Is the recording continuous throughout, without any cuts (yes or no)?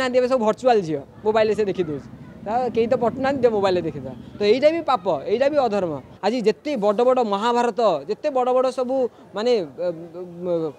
no